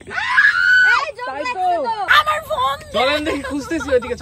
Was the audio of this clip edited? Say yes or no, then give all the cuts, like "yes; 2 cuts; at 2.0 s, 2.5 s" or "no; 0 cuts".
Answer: yes; 1 cut; at 2.0 s